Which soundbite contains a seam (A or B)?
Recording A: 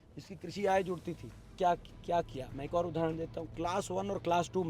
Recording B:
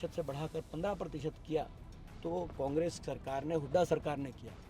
A